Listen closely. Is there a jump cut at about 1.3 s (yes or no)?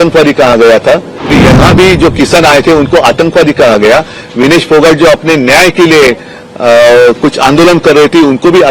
yes